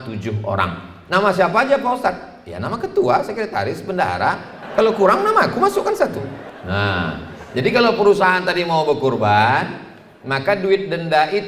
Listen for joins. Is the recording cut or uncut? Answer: cut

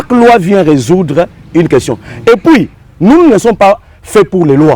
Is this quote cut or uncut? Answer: cut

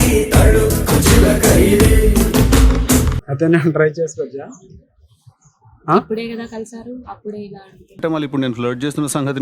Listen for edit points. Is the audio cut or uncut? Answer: cut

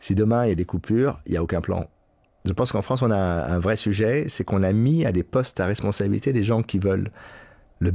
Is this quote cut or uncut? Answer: cut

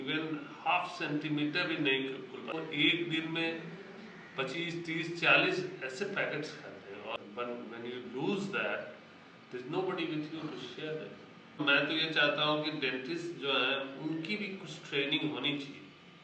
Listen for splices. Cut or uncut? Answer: cut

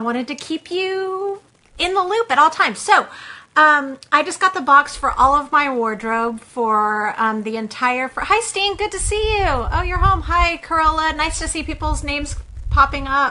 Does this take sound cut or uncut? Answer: uncut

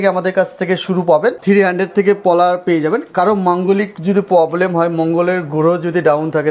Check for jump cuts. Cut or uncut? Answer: cut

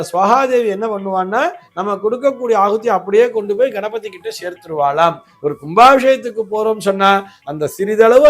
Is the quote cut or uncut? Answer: cut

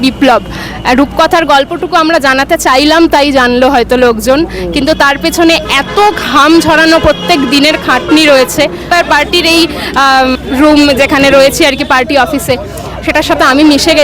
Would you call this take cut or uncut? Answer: cut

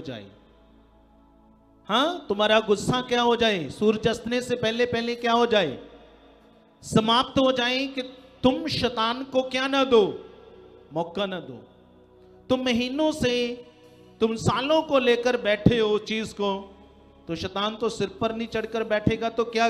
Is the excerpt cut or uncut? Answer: uncut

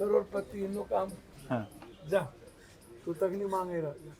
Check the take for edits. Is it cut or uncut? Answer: cut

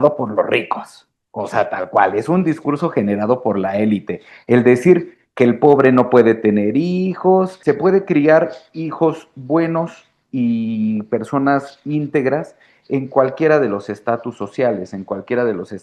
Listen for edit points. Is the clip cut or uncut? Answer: cut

